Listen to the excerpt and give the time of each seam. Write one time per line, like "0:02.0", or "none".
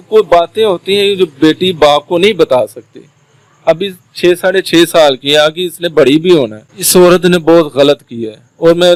none